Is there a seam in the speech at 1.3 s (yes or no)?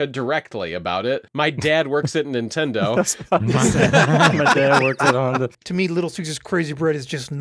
yes